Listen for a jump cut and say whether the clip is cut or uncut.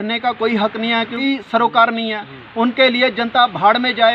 cut